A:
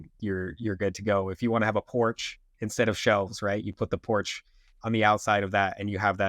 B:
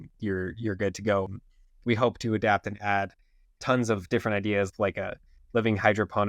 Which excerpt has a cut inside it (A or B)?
B